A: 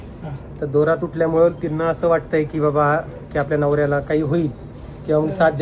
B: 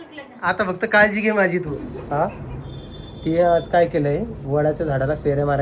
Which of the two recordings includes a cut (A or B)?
B